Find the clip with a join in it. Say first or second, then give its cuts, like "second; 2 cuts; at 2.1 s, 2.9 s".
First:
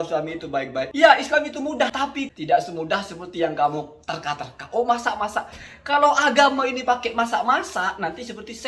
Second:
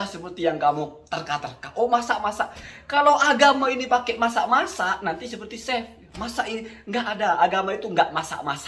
first; 2 cuts; at 0.9 s, 2.0 s